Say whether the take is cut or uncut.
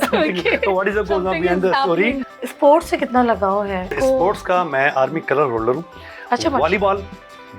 cut